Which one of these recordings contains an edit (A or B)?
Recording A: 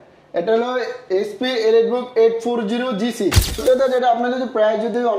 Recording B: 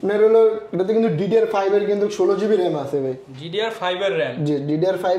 A